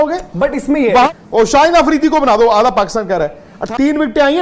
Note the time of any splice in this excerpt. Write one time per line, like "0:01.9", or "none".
0:01.1
0:03.5